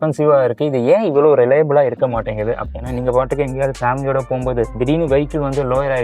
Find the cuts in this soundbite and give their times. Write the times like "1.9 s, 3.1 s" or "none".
2.7 s